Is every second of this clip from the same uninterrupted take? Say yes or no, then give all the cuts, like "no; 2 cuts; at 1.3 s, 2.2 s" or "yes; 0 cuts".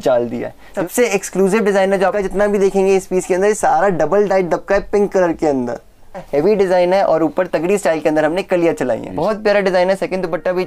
no; 4 cuts; at 0.8 s, 2.1 s, 6.3 s, 9.1 s